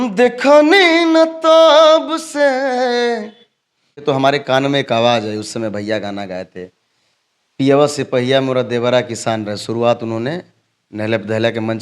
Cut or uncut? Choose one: cut